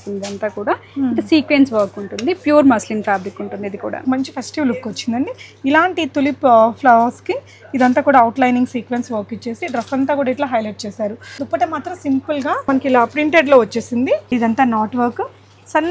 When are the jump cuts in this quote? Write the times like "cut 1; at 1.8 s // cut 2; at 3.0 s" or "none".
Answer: cut 1; at 4.0 s // cut 2; at 11.3 s // cut 3; at 12.7 s // cut 4; at 14.3 s

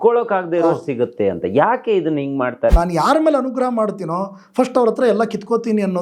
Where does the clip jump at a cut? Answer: cut 1; at 2.7 s

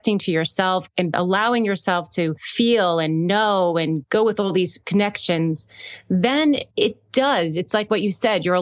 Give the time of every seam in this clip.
cut 1; at 1.1 s // cut 2; at 2.4 s // cut 3; at 6.7 s

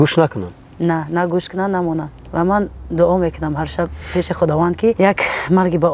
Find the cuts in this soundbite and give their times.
cut 1; at 2.2 s // cut 2; at 5.0 s

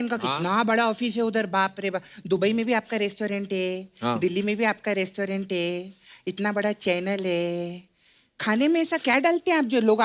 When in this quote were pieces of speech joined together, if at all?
none

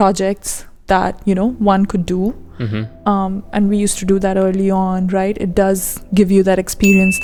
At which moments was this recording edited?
none

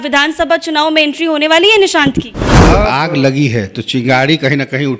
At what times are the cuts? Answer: cut 1; at 2.8 s

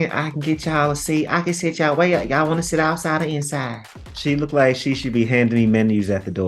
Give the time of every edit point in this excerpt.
cut 1; at 3.9 s

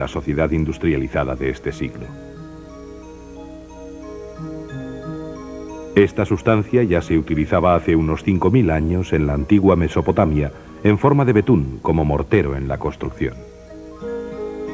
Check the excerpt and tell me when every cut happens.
none

